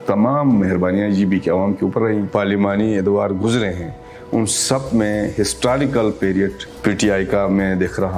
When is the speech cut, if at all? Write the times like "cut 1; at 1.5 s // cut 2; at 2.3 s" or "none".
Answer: cut 1; at 2.3 s // cut 2; at 6.7 s